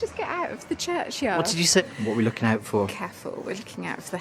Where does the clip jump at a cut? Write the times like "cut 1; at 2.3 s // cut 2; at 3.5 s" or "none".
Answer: cut 1; at 1.8 s